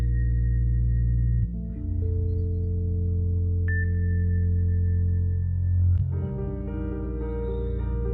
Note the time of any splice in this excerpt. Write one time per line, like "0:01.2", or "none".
none